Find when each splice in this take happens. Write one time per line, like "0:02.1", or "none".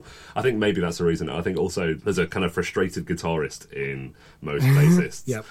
none